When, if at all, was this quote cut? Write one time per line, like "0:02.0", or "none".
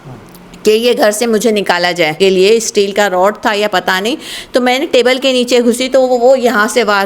0:02.2